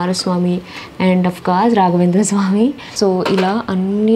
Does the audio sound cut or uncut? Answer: cut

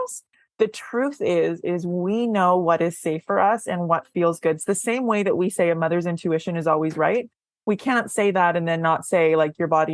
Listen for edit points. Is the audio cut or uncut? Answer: uncut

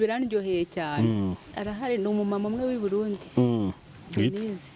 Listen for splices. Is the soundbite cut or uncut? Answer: cut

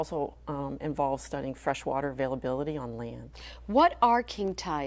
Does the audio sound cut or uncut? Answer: cut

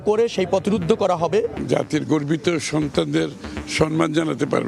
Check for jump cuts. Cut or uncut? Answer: cut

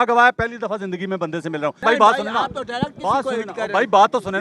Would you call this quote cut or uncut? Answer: cut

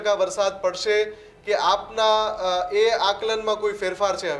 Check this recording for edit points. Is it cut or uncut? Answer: uncut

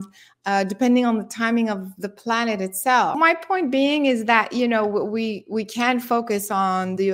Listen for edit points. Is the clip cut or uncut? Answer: cut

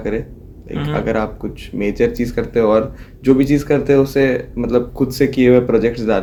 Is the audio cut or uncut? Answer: uncut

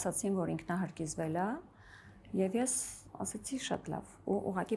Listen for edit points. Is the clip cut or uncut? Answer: uncut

